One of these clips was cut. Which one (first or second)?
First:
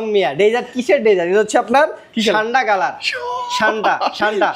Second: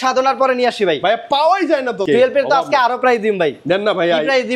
second